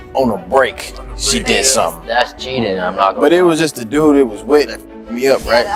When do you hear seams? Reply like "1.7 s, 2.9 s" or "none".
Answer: none